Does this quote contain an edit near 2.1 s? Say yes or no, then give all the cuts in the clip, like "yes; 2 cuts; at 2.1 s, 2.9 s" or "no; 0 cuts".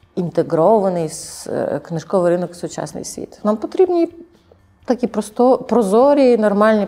no; 1 cut; at 3.4 s